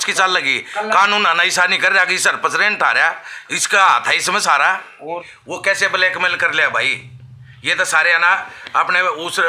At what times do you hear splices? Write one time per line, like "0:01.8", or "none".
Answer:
0:05.3